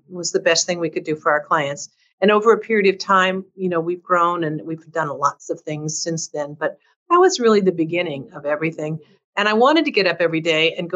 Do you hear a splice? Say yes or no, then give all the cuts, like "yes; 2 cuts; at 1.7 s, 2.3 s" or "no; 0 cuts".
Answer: no; 0 cuts